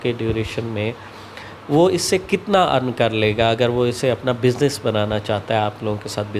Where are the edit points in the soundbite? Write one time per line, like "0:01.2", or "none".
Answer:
none